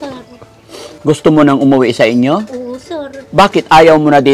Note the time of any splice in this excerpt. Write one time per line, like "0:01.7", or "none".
0:00.9